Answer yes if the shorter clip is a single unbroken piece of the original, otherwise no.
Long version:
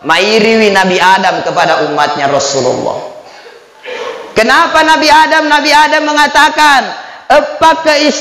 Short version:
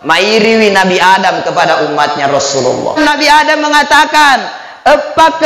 no